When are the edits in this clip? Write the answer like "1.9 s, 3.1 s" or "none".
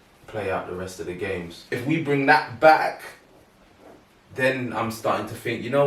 1.8 s